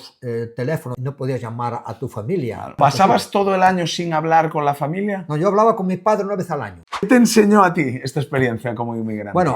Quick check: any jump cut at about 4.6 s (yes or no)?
no